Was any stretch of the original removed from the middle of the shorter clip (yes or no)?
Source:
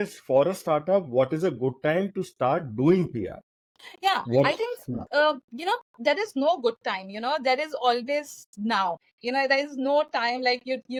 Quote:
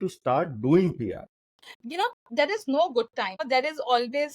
yes